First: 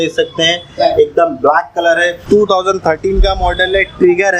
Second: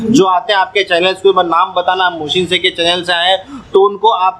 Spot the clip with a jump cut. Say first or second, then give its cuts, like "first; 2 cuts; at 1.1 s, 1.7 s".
first; 1 cut; at 2.2 s